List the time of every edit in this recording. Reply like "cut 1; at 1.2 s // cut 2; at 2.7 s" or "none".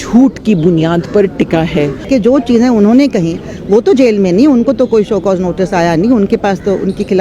cut 1; at 2.1 s